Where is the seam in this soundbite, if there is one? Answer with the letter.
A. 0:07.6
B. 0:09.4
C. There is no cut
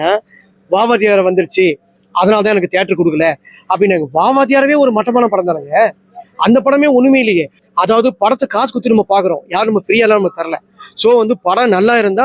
A